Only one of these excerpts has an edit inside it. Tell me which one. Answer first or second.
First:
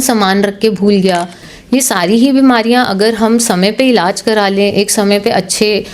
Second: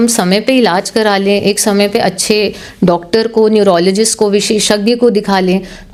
first